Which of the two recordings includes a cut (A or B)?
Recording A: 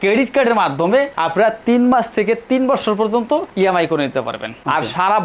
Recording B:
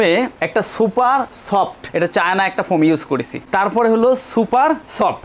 B